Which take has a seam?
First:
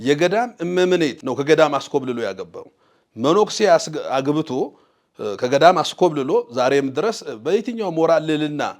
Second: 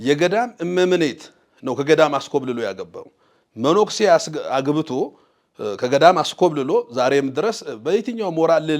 first; 1 cut; at 1.2 s

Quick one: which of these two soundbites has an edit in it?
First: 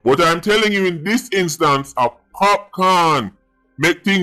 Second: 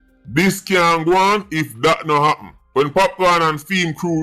second; 1 cut; at 2.5 s

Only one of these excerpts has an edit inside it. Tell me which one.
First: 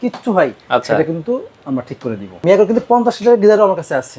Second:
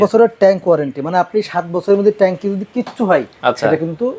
first; 1 cut; at 2.4 s

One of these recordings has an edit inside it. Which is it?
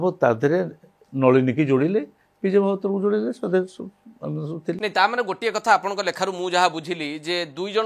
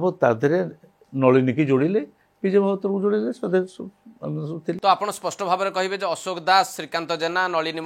first; 1 cut; at 4.8 s

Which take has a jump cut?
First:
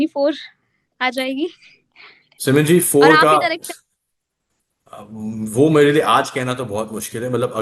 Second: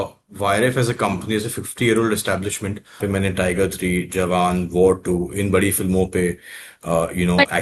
second; 1 cut; at 3.0 s

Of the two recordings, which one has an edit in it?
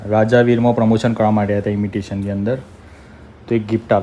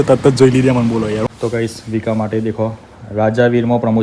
second; 1 cut; at 1.3 s

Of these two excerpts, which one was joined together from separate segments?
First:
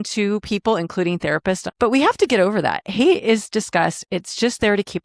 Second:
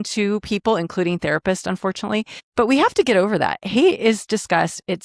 first; 1 cut; at 1.7 s

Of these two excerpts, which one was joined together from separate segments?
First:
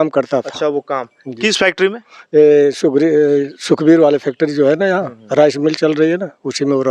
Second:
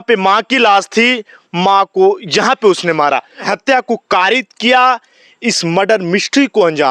second; 1 cut; at 3.5 s

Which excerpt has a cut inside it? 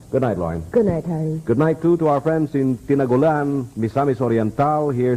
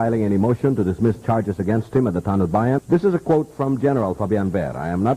second; 1 cut; at 2.8 s

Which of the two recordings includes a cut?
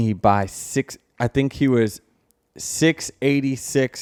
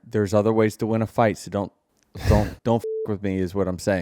second; 1 cut; at 2.6 s

